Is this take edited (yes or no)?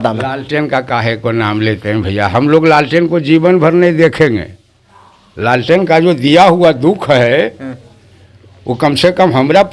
no